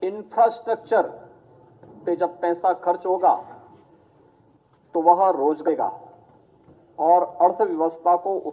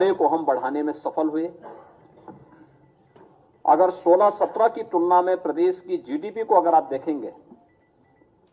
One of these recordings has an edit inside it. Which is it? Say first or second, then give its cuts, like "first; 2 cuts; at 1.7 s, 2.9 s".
first; 1 cut; at 5.6 s